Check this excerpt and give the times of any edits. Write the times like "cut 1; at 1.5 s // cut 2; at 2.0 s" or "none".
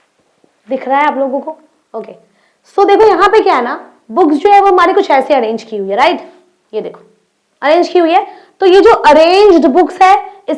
none

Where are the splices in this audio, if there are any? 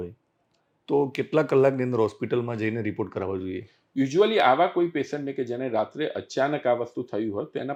none

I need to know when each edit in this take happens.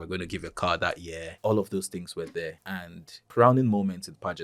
cut 1; at 1.3 s // cut 2; at 3.2 s

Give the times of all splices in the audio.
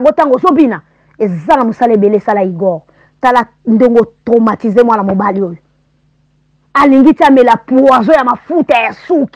none

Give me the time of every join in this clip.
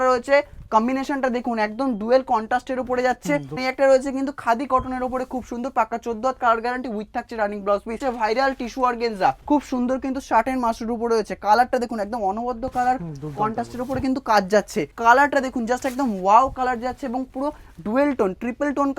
cut 1; at 3.6 s // cut 2; at 8.0 s // cut 3; at 9.4 s // cut 4; at 14.9 s

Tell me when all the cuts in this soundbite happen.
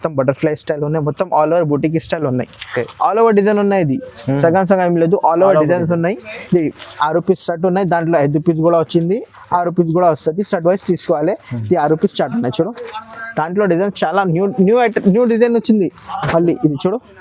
none

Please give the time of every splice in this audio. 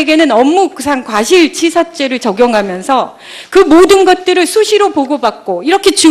cut 1; at 3.9 s

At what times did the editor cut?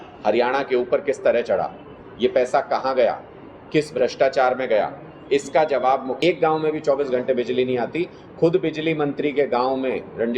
cut 1; at 6.2 s

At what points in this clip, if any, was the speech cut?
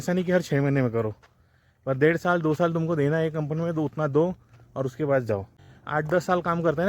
cut 1; at 5.6 s

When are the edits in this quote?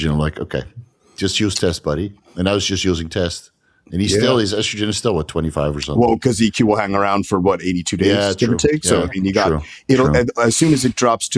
none

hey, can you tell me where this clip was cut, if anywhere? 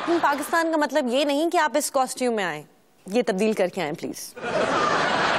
cut 1; at 4.3 s

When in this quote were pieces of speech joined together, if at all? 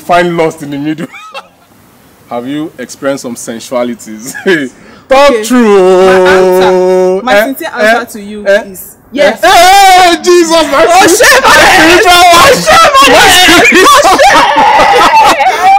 cut 1; at 1.2 s

